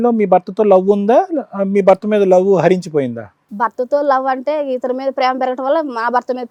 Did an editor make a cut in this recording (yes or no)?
no